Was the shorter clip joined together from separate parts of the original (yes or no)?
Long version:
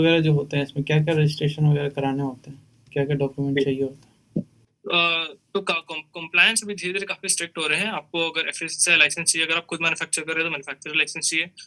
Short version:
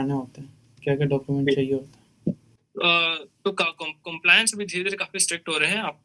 no